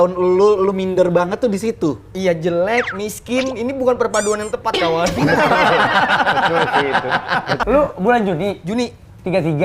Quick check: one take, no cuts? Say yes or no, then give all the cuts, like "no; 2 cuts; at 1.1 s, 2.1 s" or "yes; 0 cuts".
no; 1 cut; at 7.6 s